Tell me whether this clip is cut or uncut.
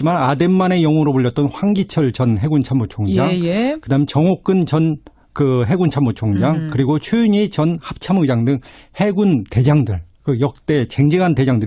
uncut